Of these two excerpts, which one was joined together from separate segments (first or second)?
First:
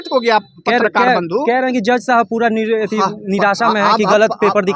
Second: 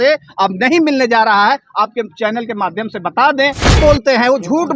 second